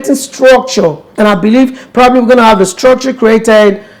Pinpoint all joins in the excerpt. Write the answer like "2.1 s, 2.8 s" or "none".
1.0 s